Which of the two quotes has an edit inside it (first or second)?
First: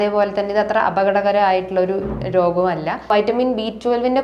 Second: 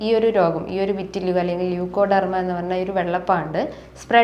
first